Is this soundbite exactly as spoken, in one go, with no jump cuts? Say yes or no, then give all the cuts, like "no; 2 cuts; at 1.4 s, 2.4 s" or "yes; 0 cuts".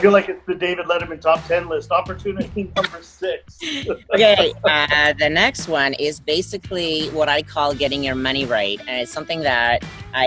yes; 0 cuts